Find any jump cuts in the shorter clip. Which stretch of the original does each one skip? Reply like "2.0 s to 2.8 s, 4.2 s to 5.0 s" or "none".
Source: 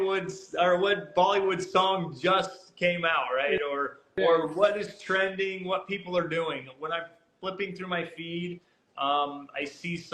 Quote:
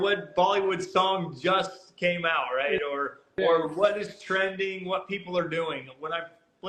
none